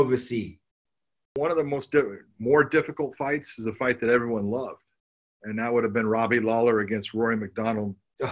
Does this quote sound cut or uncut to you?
cut